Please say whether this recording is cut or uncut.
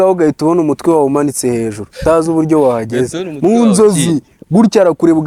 uncut